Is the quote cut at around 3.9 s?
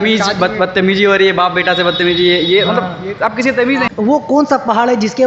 yes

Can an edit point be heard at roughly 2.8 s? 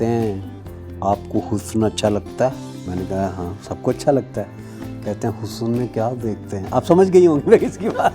yes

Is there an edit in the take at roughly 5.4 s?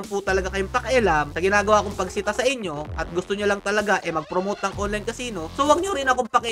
yes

